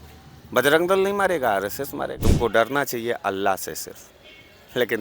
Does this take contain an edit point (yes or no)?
yes